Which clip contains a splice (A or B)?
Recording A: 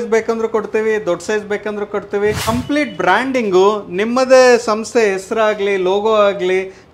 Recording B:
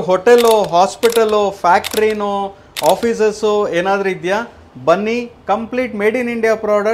A